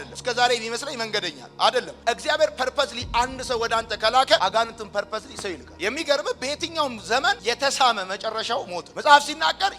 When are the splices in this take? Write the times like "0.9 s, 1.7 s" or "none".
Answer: 5.6 s

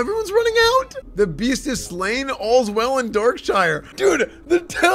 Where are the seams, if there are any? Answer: 1.0 s, 3.8 s

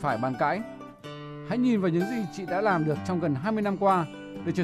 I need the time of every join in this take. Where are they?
3.4 s

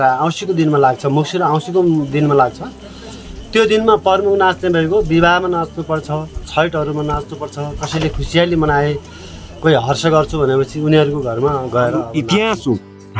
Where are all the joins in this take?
12.1 s

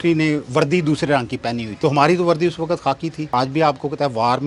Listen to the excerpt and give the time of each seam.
1.7 s, 3.1 s

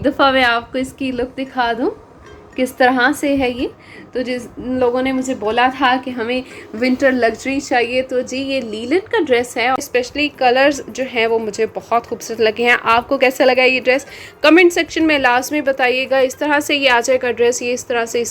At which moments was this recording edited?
9.8 s

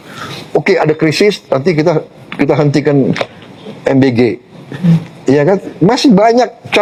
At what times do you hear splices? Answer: none

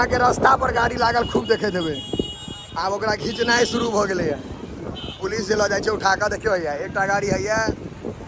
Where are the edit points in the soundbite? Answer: none

